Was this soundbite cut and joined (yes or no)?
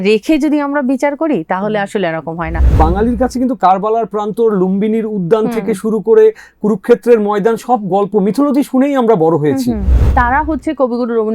yes